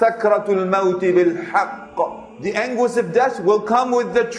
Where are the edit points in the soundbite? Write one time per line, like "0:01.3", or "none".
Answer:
0:02.3